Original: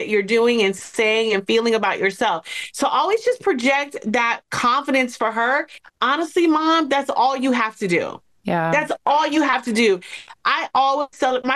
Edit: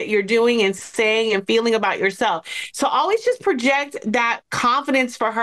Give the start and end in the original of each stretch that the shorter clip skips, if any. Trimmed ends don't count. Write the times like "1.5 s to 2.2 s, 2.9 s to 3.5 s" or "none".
none